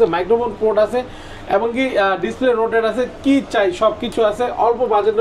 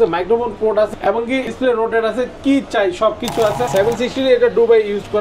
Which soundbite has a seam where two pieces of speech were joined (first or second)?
second